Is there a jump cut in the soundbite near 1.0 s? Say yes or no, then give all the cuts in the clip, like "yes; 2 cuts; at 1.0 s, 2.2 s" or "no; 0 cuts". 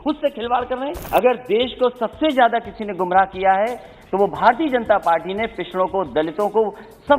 yes; 1 cut; at 1.0 s